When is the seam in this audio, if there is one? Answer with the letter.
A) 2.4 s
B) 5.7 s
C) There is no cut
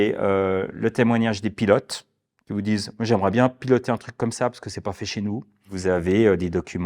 B